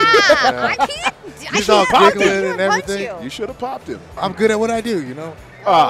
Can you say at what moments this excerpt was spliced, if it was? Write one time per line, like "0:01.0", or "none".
0:04.2